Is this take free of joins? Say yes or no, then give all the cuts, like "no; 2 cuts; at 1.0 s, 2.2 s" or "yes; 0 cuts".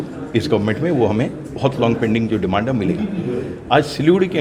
yes; 0 cuts